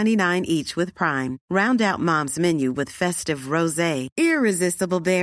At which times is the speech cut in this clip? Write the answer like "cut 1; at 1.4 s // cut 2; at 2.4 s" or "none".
none